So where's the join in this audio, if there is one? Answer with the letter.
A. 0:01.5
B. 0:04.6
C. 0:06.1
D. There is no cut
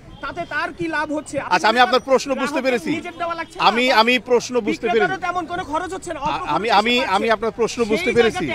A